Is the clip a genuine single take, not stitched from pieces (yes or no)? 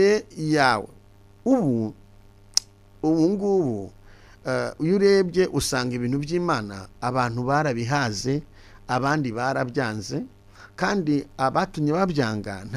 yes